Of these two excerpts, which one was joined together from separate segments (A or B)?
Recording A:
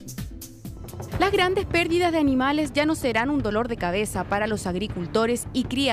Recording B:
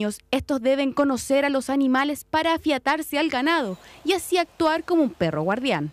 A